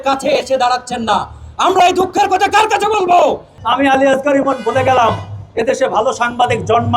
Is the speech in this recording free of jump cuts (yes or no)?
no